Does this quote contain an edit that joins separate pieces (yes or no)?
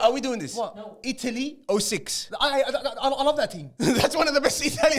no